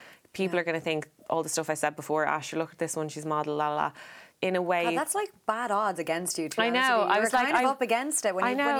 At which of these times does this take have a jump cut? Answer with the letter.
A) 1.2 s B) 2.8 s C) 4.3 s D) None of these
C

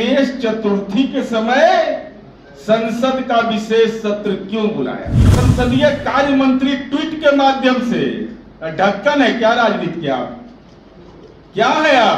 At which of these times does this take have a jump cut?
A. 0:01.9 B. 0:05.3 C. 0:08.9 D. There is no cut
B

